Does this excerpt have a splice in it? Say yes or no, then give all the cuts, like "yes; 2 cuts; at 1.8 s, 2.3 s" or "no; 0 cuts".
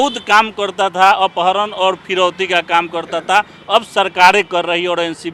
no; 0 cuts